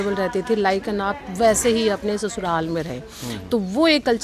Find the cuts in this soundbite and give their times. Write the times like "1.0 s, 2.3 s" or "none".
none